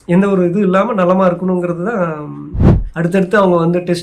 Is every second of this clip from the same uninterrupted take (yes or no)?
no